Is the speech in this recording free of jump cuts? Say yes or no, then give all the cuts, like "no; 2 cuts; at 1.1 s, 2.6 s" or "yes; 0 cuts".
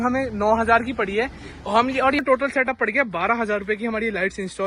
no; 1 cut; at 2.2 s